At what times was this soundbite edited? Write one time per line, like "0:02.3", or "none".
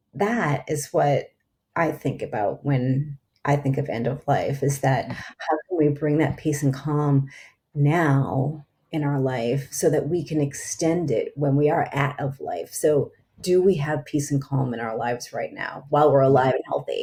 none